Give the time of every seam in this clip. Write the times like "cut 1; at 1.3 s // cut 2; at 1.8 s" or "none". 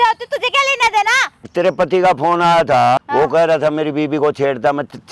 cut 1; at 1.5 s // cut 2; at 3.0 s